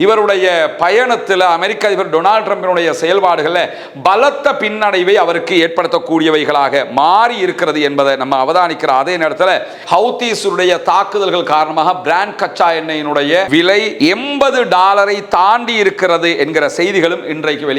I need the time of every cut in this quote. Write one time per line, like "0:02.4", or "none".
0:09.7